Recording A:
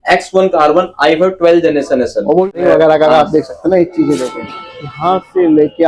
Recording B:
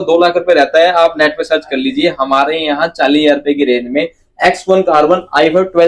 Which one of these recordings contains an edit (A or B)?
A